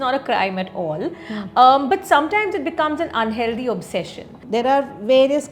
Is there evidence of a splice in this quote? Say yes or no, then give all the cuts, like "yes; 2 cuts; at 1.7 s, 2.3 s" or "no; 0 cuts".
yes; 1 cut; at 4.4 s